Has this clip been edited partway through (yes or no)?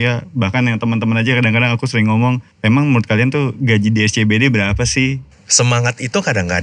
yes